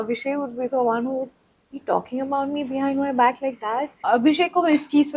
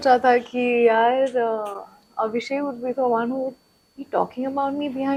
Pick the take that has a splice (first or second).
first